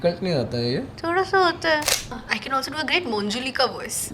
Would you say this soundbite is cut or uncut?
cut